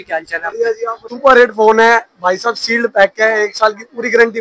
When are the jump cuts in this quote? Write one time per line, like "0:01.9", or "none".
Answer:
0:01.1